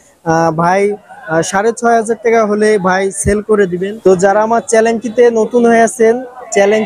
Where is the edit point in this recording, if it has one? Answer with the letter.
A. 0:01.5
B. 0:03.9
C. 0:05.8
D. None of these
B